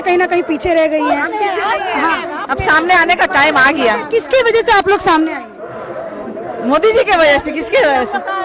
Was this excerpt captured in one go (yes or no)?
yes